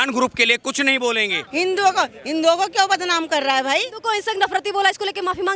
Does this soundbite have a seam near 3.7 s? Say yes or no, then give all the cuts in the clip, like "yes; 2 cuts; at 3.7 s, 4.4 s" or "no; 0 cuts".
no; 1 cut; at 1.4 s